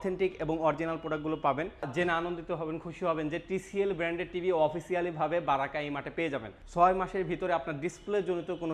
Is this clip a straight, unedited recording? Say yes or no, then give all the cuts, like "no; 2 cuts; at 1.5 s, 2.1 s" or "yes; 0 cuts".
no; 2 cuts; at 1.9 s, 6.6 s